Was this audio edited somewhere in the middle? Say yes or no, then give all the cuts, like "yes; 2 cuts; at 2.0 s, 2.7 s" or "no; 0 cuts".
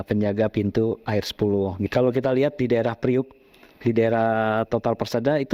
yes; 1 cut; at 1.8 s